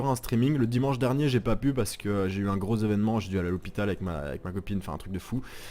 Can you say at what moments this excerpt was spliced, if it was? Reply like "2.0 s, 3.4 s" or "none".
1.1 s